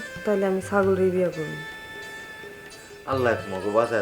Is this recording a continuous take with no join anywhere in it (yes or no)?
yes